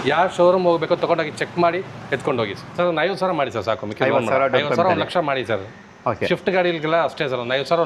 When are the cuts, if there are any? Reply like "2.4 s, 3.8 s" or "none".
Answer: 2.6 s

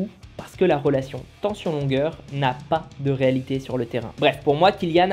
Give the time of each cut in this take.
4.1 s

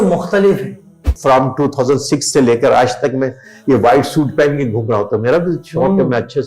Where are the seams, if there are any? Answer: 1.1 s

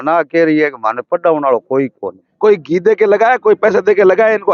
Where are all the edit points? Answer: 2.2 s

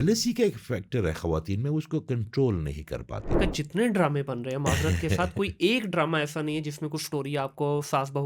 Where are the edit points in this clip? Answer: 3.3 s

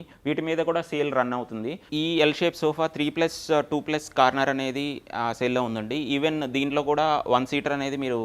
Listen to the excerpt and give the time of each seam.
1.8 s

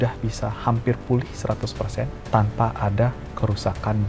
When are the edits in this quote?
2.2 s

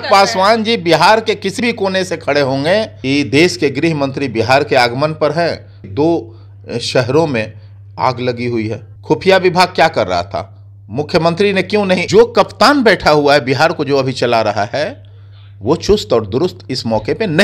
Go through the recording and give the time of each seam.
2.9 s, 5.8 s, 8.9 s, 12.0 s

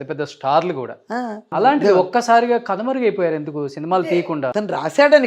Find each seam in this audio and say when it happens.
1.5 s, 4.0 s

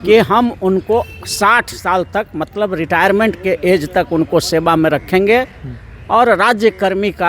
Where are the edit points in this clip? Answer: none

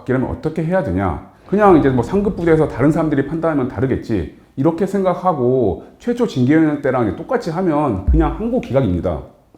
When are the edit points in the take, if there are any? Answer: 1.3 s

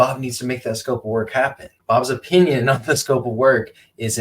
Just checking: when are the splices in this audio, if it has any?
1.7 s

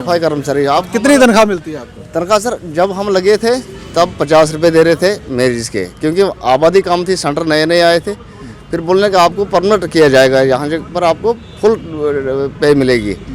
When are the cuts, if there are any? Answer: none

